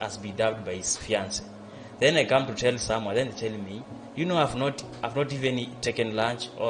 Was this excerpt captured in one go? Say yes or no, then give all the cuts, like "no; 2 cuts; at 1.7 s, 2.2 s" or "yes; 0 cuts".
yes; 0 cuts